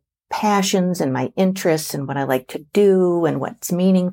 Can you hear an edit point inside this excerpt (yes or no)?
no